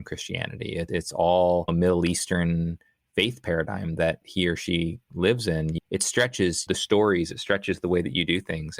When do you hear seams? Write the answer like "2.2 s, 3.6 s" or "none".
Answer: 0.9 s, 1.7 s, 4.2 s, 5.7 s, 6.6 s